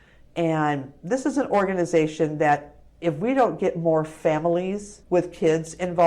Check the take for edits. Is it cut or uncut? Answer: cut